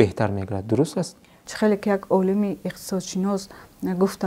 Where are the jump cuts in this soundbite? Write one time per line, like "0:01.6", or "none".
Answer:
none